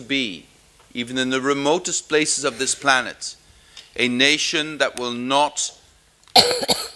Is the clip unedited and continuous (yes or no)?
yes